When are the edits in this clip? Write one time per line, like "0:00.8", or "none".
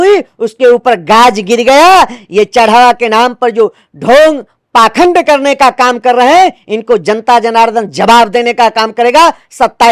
none